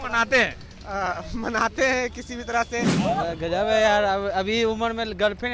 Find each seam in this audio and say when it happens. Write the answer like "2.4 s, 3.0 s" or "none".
2.9 s